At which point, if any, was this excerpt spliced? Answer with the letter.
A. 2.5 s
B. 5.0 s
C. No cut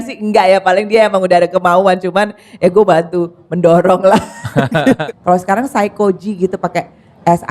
B